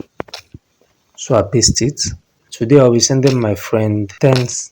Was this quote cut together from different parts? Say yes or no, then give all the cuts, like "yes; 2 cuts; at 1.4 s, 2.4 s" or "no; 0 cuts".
yes; 1 cut; at 2.5 s